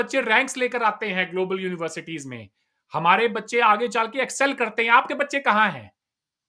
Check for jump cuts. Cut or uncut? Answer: uncut